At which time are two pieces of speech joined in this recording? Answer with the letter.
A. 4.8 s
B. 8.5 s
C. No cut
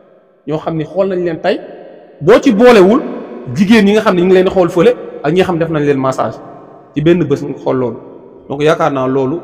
C